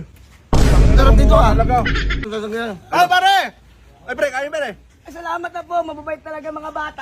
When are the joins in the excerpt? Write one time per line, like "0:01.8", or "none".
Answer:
0:02.2